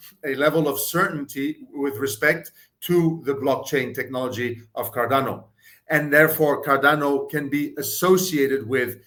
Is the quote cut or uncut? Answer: uncut